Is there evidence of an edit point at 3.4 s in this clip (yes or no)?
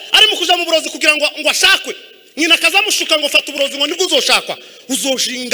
no